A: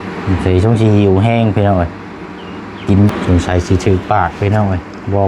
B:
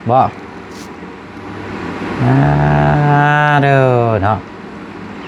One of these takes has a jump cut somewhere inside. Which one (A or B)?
A